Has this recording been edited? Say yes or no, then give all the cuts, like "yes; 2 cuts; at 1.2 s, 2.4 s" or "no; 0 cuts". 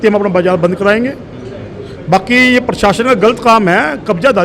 no; 0 cuts